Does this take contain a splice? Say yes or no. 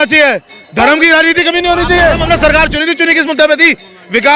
yes